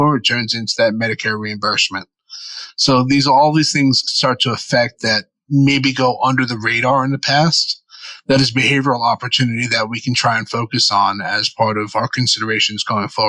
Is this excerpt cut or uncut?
uncut